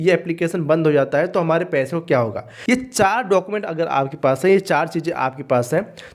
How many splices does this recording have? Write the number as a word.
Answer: one